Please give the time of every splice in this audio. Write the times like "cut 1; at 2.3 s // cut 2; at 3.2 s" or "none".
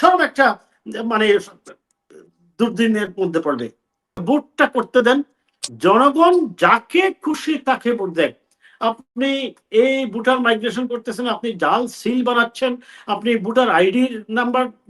cut 1; at 4.2 s